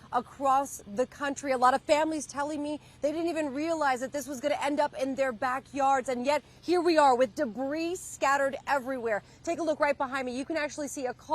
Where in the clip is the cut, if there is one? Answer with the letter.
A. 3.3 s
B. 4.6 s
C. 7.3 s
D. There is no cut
C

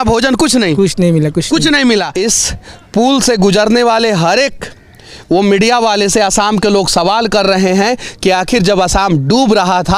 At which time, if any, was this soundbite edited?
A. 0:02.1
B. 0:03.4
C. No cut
A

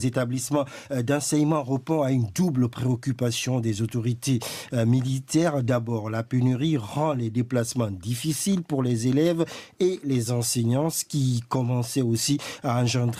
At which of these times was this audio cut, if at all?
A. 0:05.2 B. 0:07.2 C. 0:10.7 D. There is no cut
D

